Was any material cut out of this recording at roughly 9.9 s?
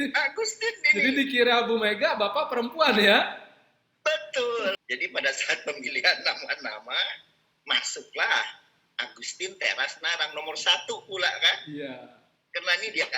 no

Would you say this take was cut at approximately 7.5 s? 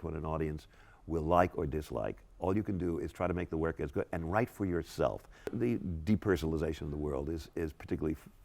no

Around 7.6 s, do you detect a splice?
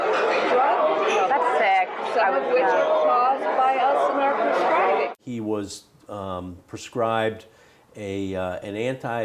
no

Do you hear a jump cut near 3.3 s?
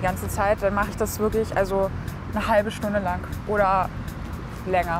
yes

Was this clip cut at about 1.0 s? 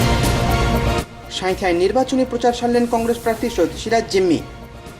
yes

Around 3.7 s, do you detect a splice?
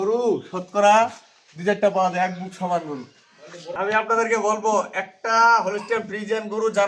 yes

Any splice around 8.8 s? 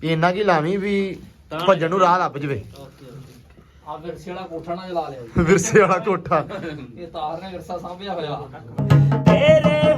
yes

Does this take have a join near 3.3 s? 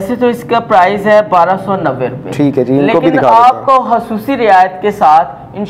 no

